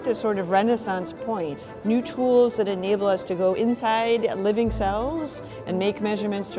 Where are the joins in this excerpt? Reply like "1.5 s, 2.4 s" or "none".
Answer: 1.6 s